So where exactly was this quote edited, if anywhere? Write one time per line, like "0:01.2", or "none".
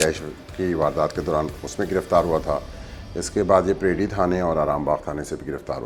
none